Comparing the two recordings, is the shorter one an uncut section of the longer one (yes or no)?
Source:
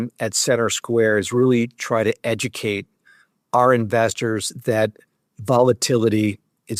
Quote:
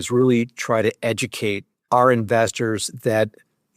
no